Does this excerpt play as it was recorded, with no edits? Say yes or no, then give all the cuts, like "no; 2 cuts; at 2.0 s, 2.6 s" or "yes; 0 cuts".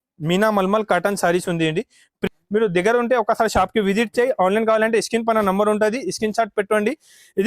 no; 1 cut; at 2.2 s